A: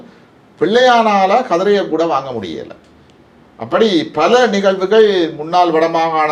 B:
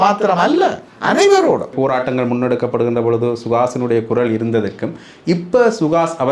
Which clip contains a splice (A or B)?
B